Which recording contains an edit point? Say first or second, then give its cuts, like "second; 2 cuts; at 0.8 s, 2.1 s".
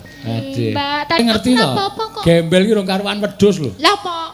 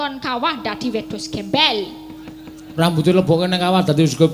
first; 1 cut; at 1.2 s